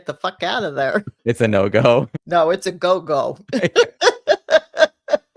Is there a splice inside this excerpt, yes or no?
yes